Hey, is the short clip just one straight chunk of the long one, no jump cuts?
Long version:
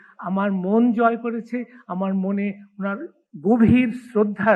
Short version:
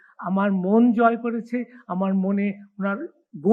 yes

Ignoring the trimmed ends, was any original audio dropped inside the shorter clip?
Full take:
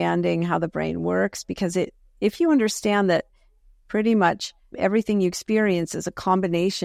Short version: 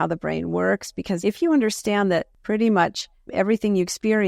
yes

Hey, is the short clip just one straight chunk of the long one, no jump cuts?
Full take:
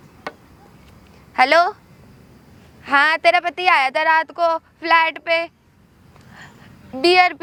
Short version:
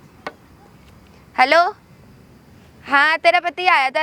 yes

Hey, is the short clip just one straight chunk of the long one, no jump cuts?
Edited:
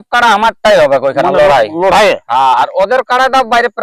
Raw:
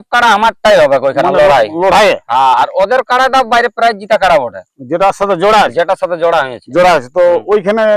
yes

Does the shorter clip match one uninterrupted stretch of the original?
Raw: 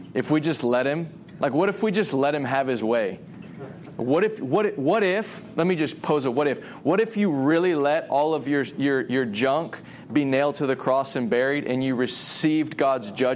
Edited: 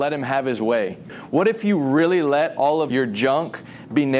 no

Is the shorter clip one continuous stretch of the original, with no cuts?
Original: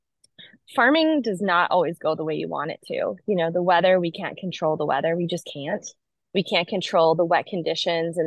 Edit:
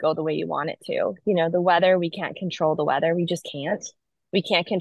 yes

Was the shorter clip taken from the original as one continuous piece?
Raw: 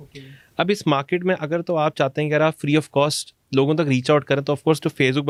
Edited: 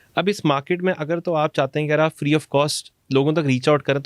yes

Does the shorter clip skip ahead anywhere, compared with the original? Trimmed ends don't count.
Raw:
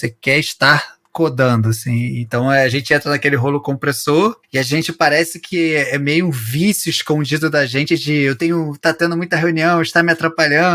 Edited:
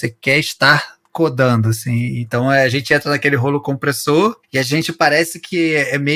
no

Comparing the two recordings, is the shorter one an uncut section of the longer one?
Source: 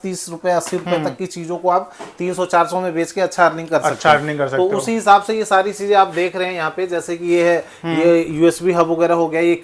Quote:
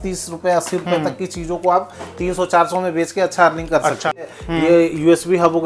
no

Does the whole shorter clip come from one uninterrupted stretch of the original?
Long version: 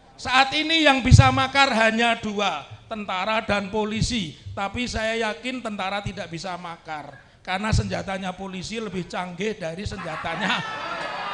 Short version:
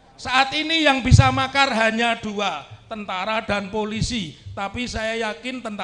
yes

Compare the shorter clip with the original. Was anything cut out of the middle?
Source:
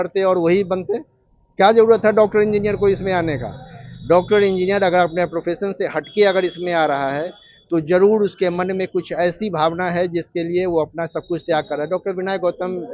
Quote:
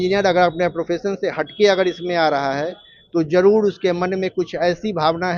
no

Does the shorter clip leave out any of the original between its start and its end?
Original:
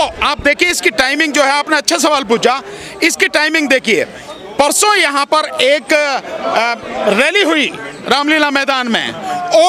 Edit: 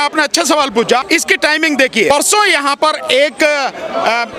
yes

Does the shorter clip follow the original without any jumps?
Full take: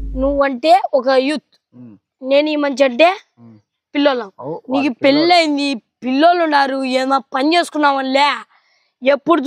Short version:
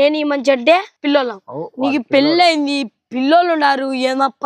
no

